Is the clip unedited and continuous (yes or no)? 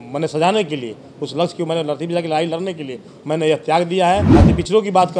no